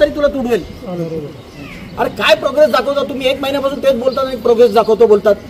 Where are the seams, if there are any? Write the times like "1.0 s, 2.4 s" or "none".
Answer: 1.2 s